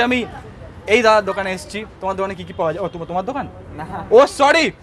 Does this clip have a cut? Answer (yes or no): no